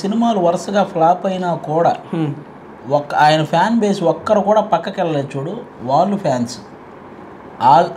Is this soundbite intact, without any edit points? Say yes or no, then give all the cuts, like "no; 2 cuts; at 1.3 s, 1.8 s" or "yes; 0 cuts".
yes; 0 cuts